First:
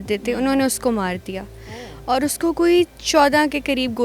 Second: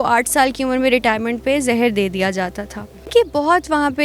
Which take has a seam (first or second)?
second